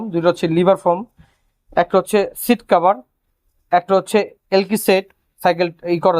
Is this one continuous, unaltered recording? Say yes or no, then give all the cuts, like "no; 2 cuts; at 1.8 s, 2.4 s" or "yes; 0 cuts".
yes; 0 cuts